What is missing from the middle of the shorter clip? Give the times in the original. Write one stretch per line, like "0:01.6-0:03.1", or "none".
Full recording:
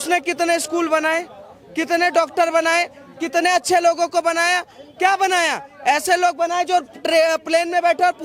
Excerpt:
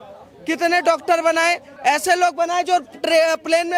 0:03.0-0:05.7